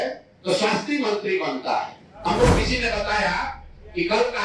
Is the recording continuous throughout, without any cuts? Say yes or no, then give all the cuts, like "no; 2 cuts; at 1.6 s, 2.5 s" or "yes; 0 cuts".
no; 1 cut; at 2.1 s